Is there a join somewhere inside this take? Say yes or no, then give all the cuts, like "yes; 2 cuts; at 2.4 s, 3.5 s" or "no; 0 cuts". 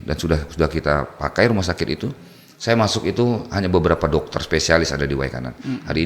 no; 0 cuts